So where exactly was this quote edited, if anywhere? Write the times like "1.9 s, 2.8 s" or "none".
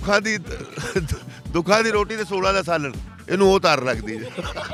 none